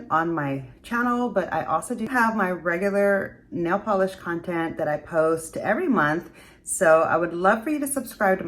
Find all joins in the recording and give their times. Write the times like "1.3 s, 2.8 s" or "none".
2.0 s